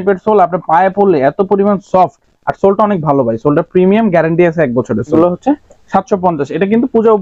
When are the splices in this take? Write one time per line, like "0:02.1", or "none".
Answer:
0:05.1